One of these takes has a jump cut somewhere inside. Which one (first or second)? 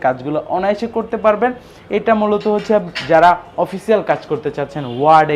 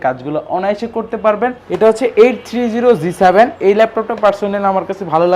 second